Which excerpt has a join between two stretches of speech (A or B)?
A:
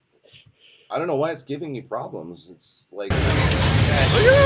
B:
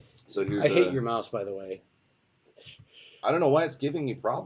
A